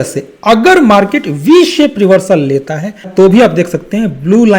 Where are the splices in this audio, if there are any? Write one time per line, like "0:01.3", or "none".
0:03.1